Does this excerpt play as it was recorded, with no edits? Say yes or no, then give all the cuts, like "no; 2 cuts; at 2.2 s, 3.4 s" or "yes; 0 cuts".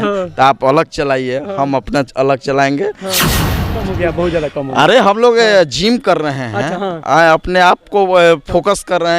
no; 1 cut; at 3.4 s